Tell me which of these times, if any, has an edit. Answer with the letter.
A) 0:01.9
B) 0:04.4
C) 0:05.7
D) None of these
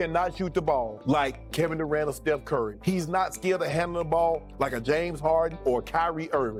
D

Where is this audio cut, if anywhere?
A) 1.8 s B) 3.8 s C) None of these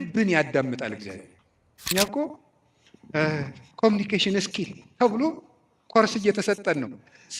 A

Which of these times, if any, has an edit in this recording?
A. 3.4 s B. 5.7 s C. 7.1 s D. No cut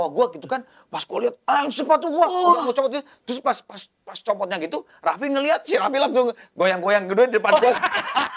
D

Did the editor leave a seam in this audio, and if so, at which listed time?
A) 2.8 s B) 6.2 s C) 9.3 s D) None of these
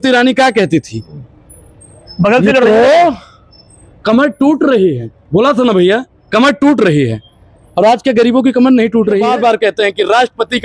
C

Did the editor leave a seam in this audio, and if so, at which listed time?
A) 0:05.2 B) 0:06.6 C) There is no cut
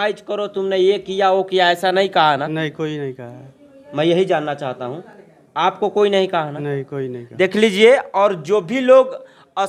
C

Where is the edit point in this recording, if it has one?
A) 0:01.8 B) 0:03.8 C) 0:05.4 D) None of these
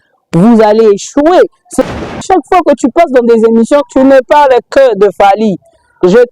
A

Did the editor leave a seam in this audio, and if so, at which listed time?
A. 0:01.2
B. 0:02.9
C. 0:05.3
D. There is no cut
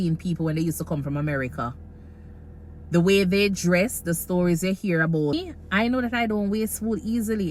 C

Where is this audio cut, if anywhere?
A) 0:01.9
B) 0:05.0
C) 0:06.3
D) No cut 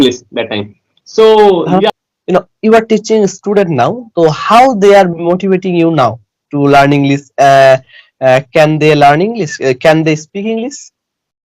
A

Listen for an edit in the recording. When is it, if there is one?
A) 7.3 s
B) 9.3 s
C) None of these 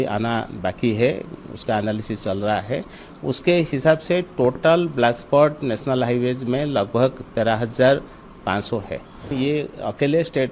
B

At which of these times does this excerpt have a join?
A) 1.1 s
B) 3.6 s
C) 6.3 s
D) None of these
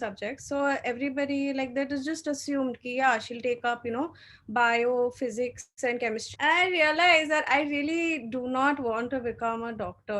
C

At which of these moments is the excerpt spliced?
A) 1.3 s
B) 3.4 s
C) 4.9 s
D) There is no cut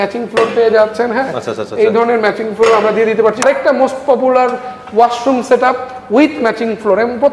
B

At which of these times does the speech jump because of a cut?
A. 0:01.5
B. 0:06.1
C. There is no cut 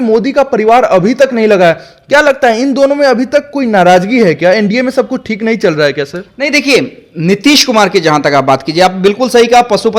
C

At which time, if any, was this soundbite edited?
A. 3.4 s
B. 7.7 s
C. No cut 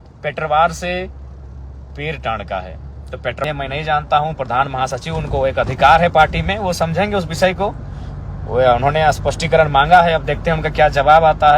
A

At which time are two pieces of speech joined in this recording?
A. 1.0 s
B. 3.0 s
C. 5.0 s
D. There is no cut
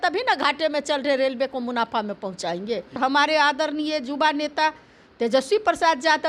B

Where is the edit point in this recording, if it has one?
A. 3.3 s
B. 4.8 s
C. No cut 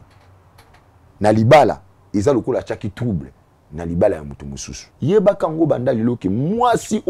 B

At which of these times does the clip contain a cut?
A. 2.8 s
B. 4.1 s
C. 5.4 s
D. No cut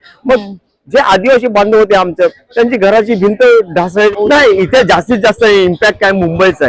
B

